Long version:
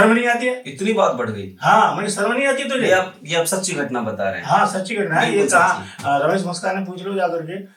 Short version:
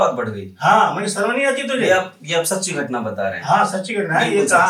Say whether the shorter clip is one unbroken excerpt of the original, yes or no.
yes